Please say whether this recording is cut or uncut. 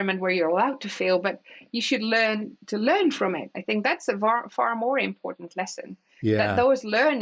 uncut